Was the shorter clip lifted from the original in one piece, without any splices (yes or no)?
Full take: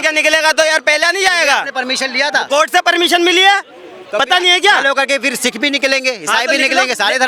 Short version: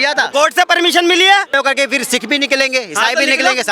no